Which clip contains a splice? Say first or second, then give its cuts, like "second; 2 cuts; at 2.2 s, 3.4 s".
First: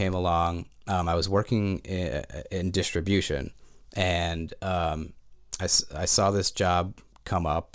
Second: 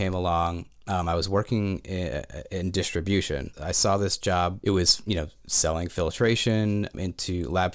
second; 3 cuts; at 3.5 s, 4.6 s, 6.9 s